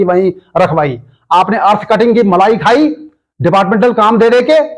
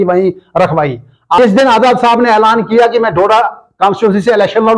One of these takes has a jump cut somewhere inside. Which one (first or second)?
second